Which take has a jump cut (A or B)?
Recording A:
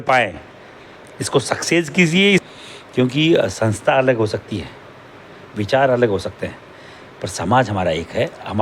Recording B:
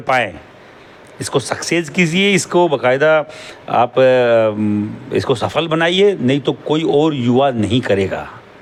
A